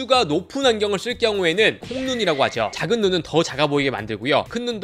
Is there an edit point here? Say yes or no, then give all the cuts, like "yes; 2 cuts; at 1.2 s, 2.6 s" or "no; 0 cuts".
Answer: yes; 1 cut; at 1.8 s